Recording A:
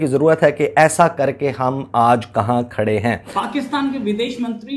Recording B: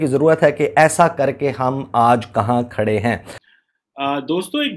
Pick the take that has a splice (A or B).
B